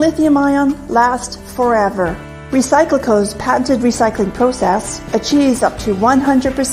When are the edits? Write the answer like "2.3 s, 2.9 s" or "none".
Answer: 1.2 s